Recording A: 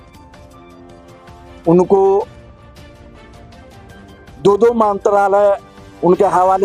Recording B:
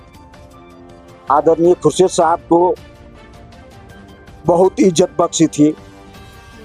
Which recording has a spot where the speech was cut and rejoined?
B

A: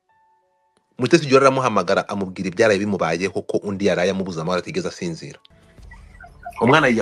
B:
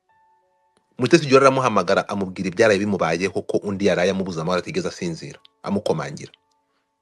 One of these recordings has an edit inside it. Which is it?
A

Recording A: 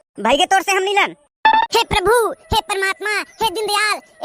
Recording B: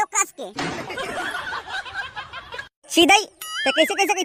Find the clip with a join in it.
A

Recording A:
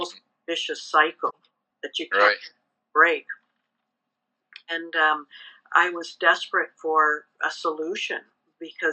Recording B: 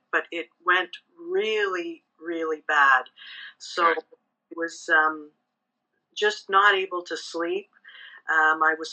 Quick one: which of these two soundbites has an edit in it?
A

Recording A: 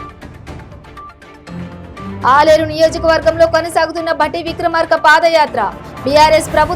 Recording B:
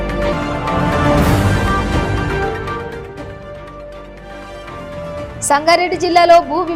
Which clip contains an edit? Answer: A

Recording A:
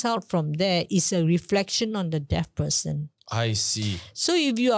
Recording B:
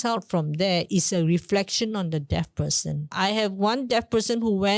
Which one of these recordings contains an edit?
B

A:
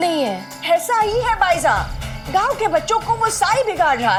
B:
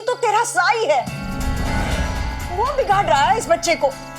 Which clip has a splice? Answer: B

